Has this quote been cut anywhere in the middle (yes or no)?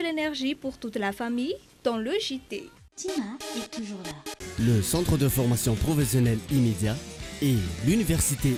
no